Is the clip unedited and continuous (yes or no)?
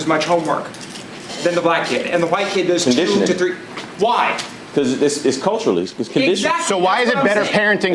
yes